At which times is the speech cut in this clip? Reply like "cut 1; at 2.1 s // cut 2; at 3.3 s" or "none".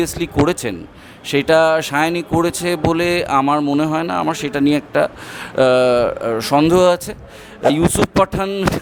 cut 1; at 7.7 s